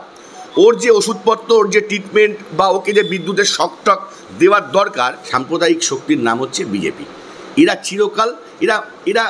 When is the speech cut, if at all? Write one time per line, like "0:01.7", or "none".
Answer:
0:05.3